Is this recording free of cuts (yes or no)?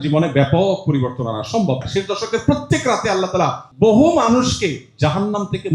no